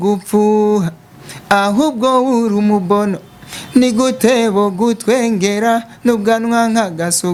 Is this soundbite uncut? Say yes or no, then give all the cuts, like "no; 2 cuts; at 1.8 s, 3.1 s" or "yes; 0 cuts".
yes; 0 cuts